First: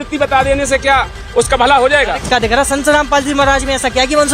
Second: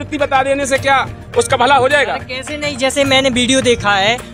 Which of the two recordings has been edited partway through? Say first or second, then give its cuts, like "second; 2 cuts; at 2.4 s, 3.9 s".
first; 1 cut; at 2.3 s